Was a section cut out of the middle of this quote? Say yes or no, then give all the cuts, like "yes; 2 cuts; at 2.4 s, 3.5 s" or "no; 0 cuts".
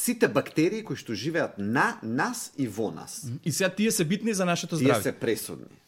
no; 0 cuts